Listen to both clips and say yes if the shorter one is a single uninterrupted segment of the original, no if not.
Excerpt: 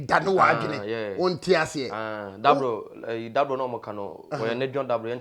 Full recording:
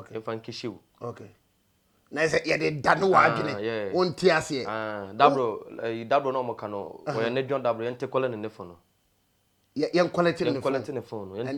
yes